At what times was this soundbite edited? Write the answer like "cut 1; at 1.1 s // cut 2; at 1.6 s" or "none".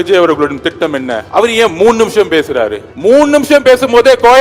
cut 1; at 1.2 s // cut 2; at 2.9 s